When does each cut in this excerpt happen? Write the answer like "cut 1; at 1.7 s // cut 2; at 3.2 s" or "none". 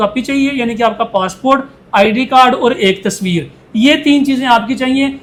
none

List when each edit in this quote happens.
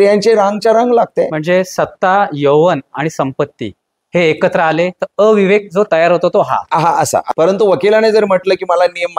cut 1; at 7.3 s

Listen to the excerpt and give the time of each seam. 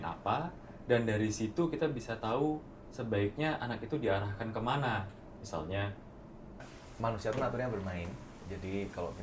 cut 1; at 6.7 s

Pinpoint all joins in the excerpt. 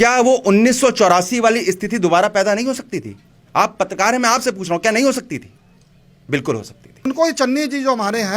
cut 1; at 7.1 s

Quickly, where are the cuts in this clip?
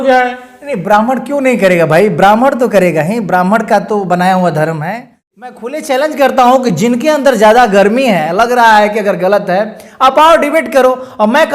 cut 1; at 5.5 s

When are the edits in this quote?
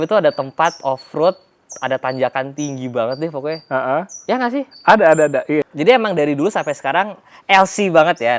cut 1; at 5.6 s

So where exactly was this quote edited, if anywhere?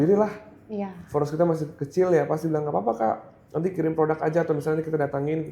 none

